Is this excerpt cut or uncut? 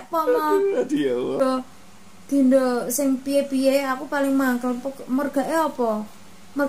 cut